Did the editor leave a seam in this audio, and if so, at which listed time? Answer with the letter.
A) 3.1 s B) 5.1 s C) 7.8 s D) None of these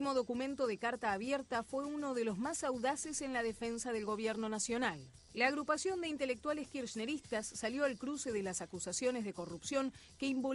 C